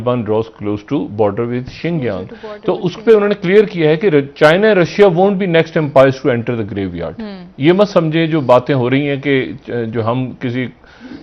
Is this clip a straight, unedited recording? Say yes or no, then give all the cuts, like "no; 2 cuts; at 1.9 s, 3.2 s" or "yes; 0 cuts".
yes; 0 cuts